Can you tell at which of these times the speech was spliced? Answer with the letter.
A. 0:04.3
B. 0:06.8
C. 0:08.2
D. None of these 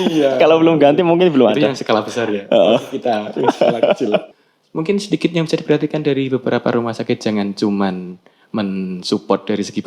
A